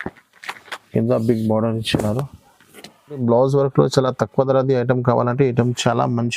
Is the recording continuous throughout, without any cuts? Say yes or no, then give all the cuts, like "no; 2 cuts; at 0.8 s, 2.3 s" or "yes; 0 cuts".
no; 1 cut; at 3.2 s